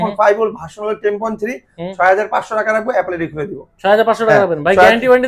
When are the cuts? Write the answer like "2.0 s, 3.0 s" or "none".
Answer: none